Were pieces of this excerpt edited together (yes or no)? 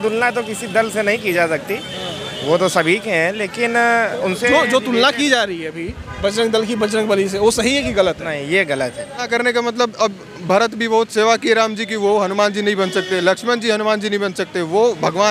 yes